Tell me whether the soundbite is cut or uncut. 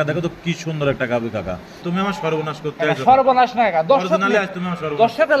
cut